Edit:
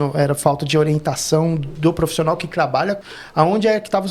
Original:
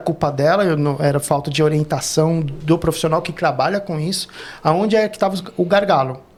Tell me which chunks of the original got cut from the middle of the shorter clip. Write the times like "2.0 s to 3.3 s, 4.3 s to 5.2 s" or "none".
3.9 s to 4.3 s

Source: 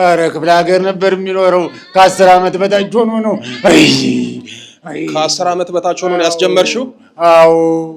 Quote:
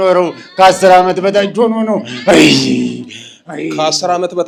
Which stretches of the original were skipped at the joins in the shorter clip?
none

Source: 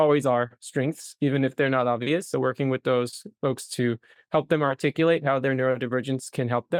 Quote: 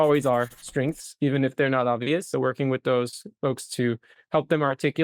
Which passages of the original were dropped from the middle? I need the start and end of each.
none

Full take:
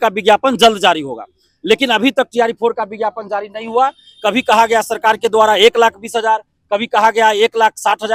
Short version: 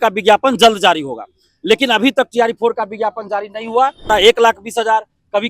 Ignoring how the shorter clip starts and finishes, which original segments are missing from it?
4.1 s to 5.5 s

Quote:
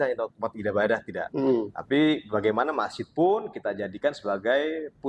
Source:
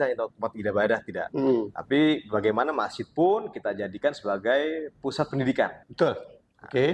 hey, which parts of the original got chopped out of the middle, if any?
none

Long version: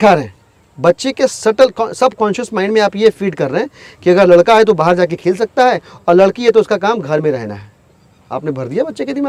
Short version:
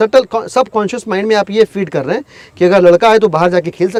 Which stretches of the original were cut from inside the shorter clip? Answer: none

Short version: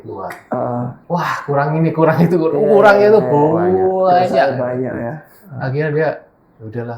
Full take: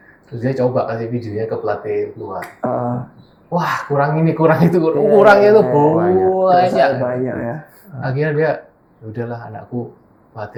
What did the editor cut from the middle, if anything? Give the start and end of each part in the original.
3.1 s to 3.4 s

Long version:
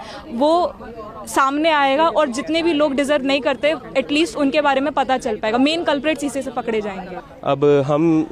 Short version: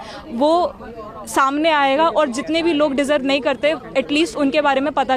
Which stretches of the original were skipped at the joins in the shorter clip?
none

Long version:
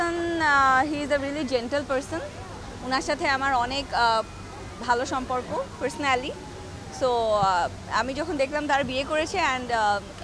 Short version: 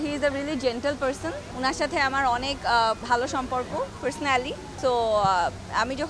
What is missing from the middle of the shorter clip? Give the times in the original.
2.3 s to 2.7 s, 4.3 s to 4.8 s, 6.4 s to 6.8 s

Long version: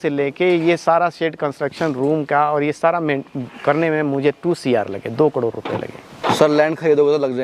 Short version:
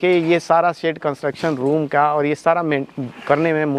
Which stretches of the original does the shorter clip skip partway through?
none

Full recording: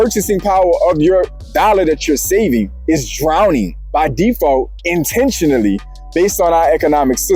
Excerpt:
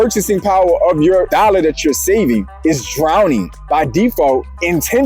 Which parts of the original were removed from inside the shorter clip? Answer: 1.3 s to 1.5 s

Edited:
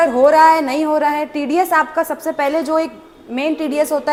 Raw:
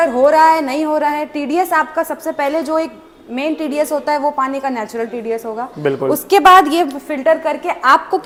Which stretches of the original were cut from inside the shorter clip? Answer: none

